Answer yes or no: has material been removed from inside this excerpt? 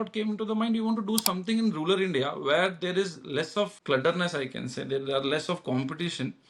yes